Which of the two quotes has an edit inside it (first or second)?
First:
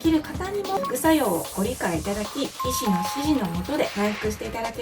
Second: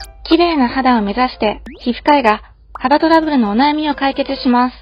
first